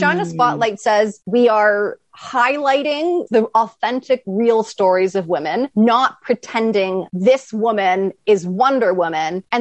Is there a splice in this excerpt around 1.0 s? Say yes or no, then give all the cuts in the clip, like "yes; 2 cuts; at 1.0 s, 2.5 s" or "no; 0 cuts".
no; 3 cuts; at 3.2 s, 5.7 s, 7.0 s